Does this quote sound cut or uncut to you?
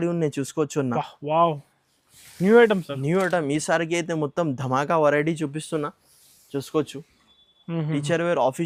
uncut